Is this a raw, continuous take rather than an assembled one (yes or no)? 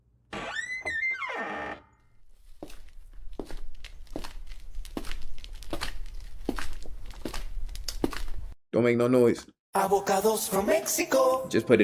yes